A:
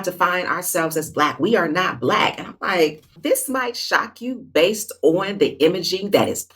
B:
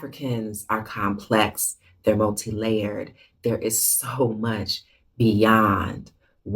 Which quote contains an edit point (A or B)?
A